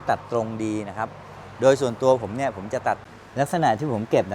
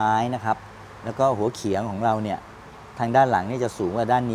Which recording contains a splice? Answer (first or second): first